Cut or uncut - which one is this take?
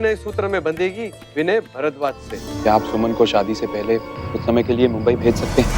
cut